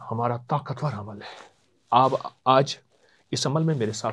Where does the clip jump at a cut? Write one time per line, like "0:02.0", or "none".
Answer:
none